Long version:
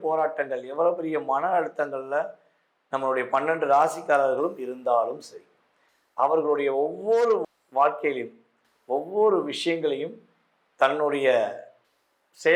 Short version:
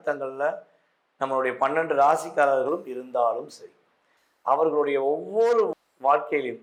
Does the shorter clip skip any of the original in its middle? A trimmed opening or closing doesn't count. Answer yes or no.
no